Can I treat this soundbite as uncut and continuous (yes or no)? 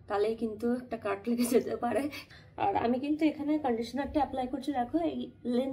no